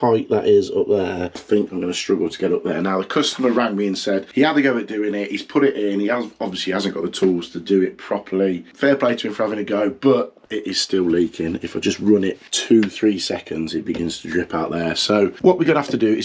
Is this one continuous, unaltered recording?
no; 4 cuts; at 4.3 s, 8.7 s, 12.5 s, 15.4 s

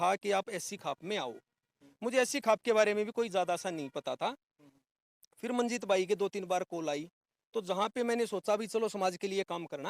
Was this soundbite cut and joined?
no; 0 cuts

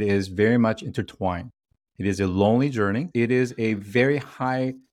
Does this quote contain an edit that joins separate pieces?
yes; 1 cut; at 3.1 s

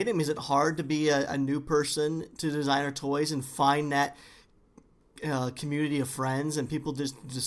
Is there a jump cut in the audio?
no; 0 cuts

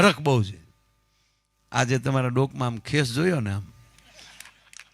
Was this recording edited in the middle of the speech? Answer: no; 0 cuts

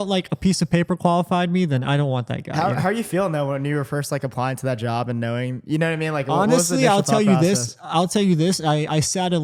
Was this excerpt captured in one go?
yes; 0 cuts

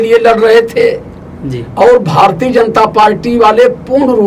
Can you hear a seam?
no; 0 cuts

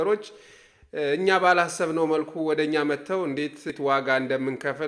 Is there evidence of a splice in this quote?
yes; 1 cut; at 3.7 s

